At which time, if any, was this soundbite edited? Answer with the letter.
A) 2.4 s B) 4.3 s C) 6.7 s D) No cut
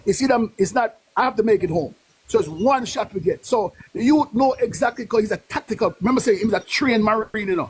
D